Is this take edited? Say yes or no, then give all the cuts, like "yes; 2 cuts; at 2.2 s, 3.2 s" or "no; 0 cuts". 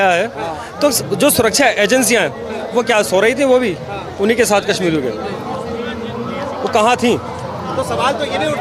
no; 0 cuts